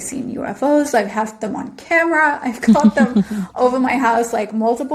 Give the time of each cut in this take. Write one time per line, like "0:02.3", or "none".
none